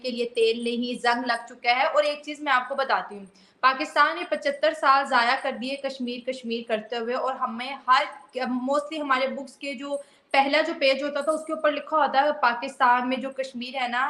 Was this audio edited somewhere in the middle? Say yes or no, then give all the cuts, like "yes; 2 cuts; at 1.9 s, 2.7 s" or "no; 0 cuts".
no; 0 cuts